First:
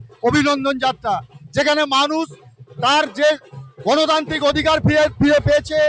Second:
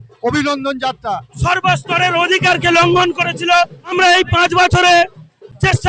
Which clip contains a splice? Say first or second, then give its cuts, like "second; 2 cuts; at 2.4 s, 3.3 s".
second; 2 cuts; at 1.3 s, 3.9 s